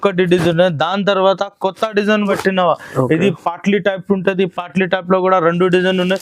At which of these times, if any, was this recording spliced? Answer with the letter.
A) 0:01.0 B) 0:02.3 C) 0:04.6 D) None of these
B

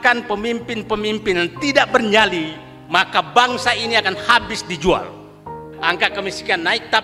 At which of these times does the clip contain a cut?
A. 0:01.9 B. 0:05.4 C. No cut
B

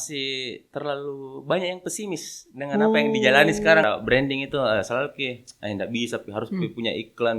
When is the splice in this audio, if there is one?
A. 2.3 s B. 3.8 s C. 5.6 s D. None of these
B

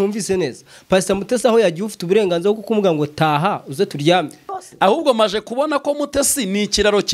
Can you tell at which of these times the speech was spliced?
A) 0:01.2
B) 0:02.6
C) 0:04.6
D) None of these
C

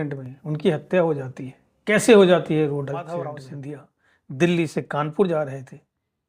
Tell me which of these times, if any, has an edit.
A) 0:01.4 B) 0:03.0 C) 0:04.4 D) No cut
B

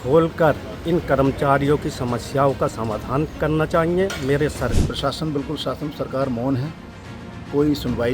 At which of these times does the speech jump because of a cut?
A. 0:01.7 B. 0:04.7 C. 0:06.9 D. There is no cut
B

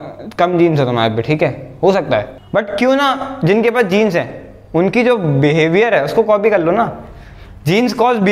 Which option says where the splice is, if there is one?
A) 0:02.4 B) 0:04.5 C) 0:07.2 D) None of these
A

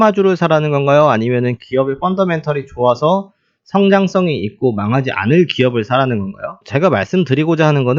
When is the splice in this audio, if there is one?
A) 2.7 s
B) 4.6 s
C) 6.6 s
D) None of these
C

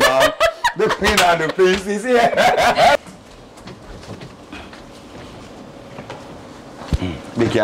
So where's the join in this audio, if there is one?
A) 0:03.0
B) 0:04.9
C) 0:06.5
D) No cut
A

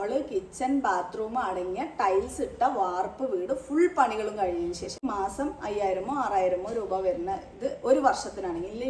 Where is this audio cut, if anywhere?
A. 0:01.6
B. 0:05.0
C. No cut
B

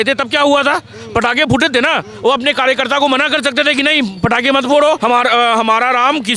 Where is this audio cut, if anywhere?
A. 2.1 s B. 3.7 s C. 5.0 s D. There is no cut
C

